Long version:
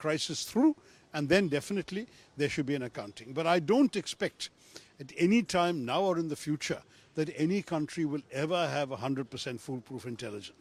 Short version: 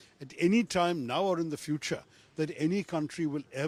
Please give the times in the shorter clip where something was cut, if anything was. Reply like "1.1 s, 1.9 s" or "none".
none